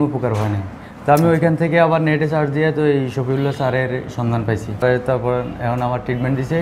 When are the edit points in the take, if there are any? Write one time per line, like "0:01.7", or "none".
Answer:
0:04.8